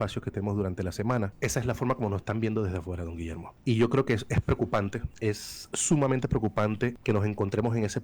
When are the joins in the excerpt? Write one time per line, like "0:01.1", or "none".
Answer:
0:01.3
0:03.5
0:05.1
0:07.0